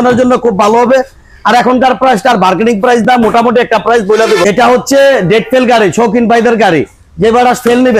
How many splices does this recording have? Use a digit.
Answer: 0